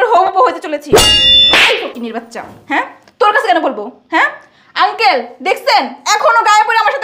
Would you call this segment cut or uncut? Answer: cut